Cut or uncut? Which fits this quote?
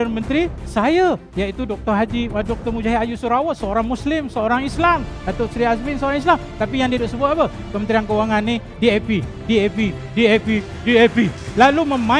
uncut